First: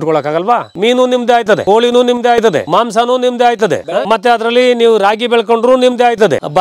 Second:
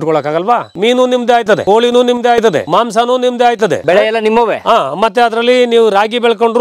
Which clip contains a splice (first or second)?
first